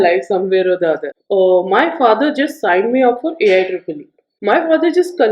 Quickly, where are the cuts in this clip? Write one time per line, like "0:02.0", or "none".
0:01.1